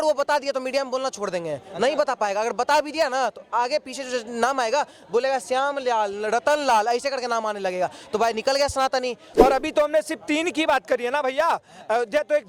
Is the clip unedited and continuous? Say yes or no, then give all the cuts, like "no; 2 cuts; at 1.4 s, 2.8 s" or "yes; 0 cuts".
no; 1 cut; at 9.2 s